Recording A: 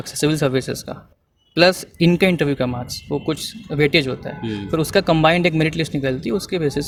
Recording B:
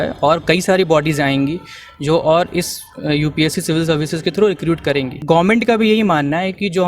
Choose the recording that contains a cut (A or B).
B